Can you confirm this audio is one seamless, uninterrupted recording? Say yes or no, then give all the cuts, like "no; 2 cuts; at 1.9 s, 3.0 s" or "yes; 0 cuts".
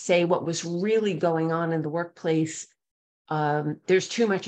yes; 0 cuts